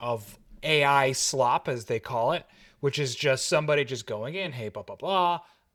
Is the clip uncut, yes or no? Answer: yes